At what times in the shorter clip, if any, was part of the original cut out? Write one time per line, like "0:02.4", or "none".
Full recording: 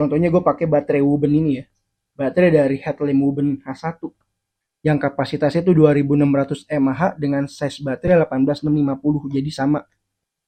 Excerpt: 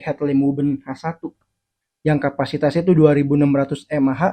none